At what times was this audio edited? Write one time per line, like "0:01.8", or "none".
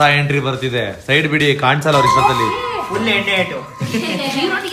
none